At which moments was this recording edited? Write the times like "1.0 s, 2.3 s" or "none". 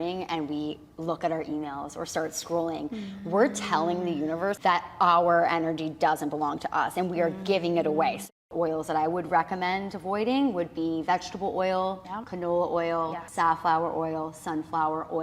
4.6 s, 8.3 s, 12.1 s, 13.2 s